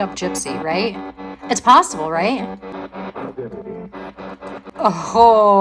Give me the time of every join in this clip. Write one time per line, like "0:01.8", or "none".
0:02.7
0:04.7